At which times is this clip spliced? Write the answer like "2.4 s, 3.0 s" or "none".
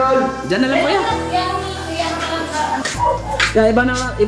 2.9 s

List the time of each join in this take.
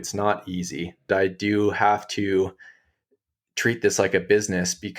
1.1 s

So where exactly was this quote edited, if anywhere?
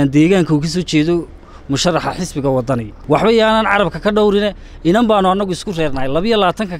2.9 s

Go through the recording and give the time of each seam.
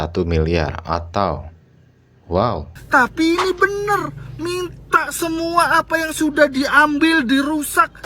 2.7 s

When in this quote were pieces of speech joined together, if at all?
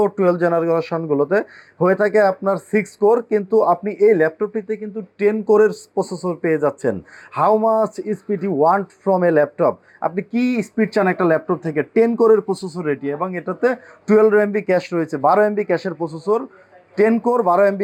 none

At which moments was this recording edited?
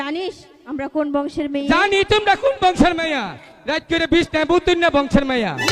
3.3 s

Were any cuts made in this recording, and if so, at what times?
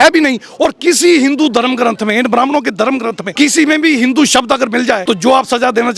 3.2 s, 5.0 s

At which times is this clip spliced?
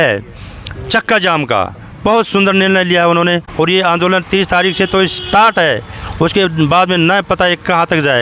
3.5 s

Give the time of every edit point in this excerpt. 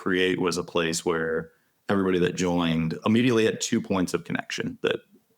2.9 s

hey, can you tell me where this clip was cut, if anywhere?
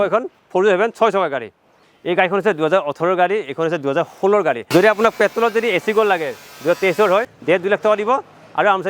1.6 s, 4.6 s, 7.3 s

